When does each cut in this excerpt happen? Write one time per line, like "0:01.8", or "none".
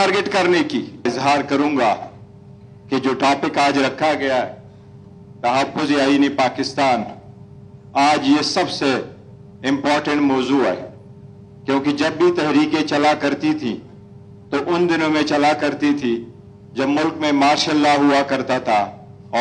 none